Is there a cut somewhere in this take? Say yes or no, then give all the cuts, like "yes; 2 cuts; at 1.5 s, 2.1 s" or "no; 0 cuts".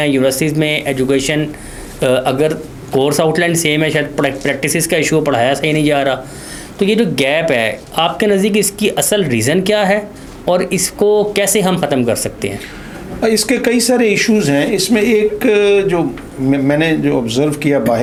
no; 0 cuts